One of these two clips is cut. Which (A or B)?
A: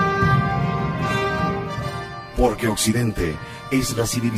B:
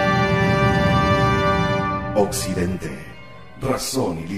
A